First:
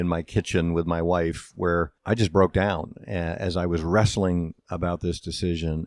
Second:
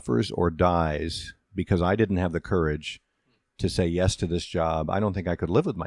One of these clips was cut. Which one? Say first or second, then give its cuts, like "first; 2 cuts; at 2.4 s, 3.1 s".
first; 1 cut; at 2.0 s